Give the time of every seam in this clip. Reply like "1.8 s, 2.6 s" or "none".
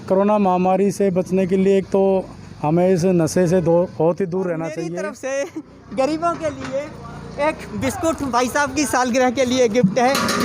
4.9 s

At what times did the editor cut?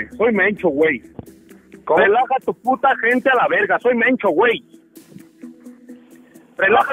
4.7 s, 6.1 s

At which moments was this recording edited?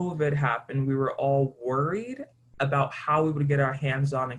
none

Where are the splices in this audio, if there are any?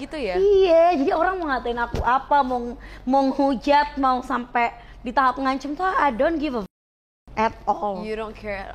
none

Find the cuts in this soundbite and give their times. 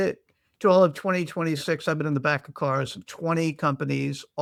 none

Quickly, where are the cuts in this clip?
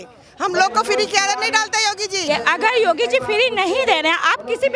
2.2 s

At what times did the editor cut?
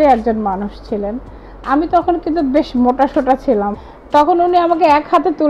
3.8 s

